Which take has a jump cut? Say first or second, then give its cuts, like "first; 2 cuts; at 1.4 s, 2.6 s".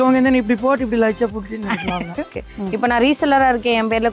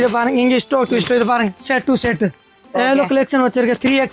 first; 1 cut; at 2.4 s